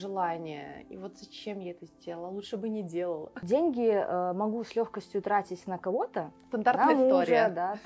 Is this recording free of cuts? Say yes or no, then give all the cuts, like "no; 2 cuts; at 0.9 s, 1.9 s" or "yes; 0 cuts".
no; 2 cuts; at 3.4 s, 6.4 s